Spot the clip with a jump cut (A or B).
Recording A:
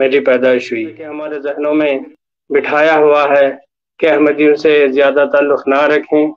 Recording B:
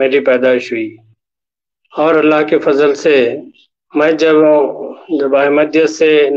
A